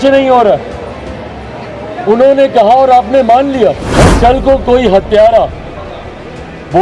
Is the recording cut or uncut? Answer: cut